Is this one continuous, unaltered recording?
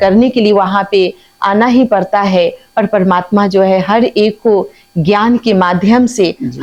yes; 0 cuts

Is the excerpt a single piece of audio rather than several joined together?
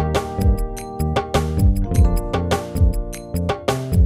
yes; 0 cuts

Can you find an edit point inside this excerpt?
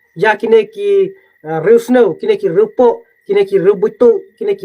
no; 0 cuts

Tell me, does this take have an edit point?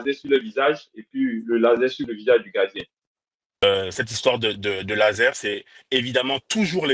yes; 1 cut; at 3.5 s

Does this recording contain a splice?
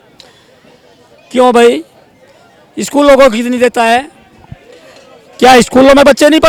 no; 0 cuts

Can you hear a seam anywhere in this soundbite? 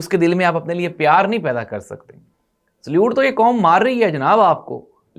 no; 0 cuts

